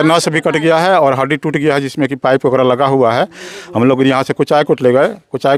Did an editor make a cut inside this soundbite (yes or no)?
no